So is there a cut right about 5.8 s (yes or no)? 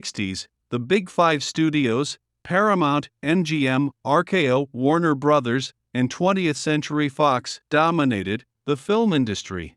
yes